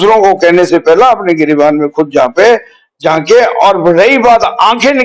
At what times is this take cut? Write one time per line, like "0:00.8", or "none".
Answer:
none